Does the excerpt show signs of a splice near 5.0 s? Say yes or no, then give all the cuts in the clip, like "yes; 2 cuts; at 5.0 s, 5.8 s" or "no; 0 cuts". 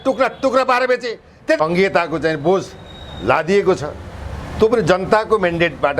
no; 1 cut; at 1.6 s